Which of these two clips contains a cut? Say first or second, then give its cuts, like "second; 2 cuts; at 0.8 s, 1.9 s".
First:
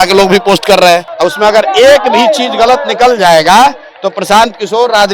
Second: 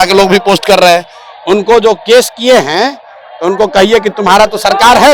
first; 1 cut; at 1.1 s